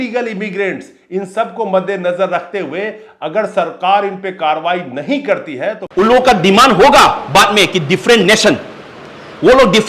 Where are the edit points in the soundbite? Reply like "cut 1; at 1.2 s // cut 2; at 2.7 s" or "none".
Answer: cut 1; at 5.8 s